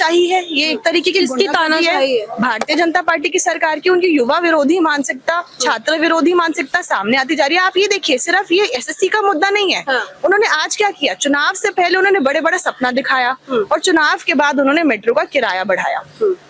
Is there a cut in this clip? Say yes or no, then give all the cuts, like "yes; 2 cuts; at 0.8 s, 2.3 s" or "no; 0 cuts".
no; 0 cuts